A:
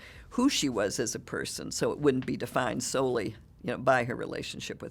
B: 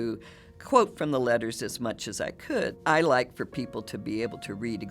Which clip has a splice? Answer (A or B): B